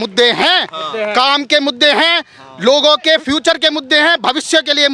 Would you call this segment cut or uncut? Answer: uncut